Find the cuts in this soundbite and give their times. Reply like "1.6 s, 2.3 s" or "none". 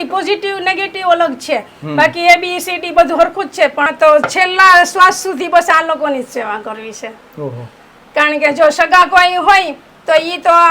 3.9 s